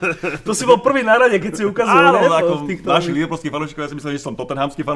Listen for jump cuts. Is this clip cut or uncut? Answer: uncut